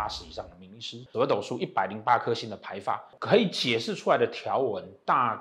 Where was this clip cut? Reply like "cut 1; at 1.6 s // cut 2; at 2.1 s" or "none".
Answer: cut 1; at 1.0 s // cut 2; at 3.1 s